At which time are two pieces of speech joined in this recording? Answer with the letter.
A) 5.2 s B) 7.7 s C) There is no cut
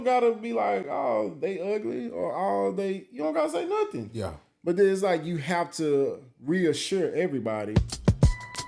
B